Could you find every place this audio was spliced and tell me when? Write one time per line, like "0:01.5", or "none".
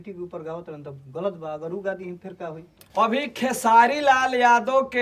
0:02.7